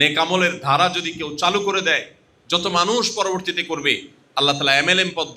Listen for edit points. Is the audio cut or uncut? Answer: uncut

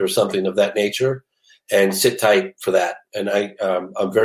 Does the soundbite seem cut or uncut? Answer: uncut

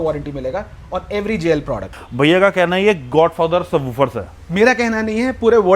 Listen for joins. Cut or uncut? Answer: cut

